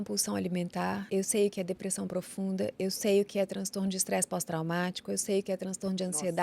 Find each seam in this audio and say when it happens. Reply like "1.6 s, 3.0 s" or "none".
1.0 s